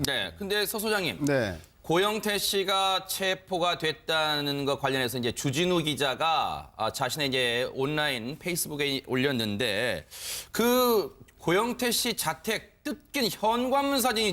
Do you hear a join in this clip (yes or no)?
yes